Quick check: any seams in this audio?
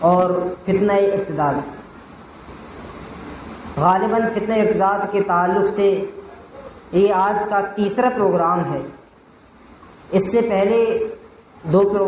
no; 0 cuts

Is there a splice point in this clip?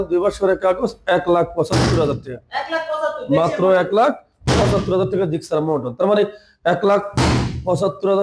no; 0 cuts

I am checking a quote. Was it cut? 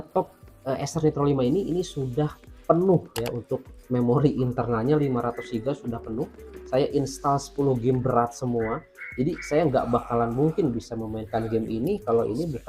no; 0 cuts

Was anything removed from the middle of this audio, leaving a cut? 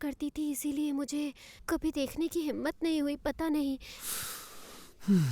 no; 0 cuts

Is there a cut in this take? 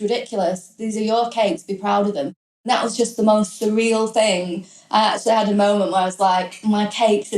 yes; 1 cut; at 2.7 s

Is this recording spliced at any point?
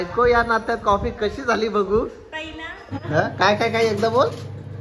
yes; 1 cut; at 2.9 s

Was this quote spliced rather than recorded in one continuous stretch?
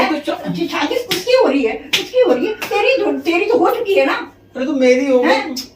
no; 0 cuts

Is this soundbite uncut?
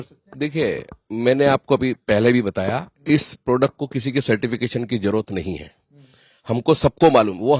yes; 0 cuts

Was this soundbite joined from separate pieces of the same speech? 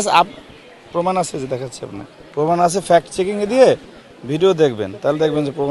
no; 0 cuts

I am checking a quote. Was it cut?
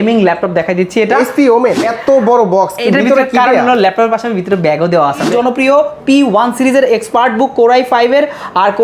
yes; 2 cuts; at 1.9 s, 5.3 s

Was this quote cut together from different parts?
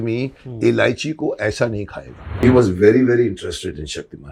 yes; 1 cut; at 2.4 s

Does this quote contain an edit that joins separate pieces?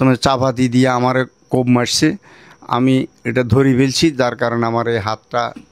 no; 0 cuts

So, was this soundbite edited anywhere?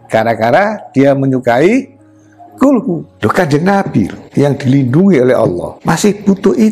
yes; 3 cuts; at 3.1 s, 4.2 s, 5.7 s

